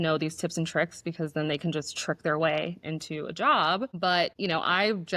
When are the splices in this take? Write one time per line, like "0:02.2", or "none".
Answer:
none